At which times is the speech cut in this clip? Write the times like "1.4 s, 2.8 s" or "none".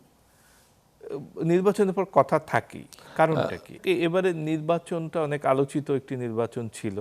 3.7 s